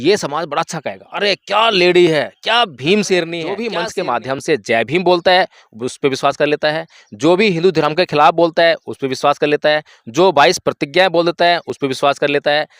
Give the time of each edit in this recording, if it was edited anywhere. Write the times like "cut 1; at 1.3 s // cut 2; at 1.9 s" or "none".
cut 1; at 3.7 s